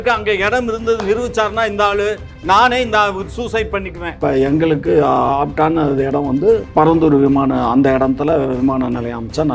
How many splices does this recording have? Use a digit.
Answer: 2